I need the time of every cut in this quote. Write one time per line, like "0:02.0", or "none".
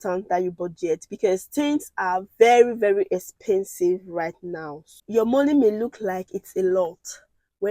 0:05.0